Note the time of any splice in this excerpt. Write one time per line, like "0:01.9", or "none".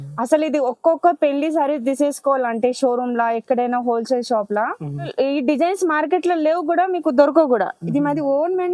0:05.1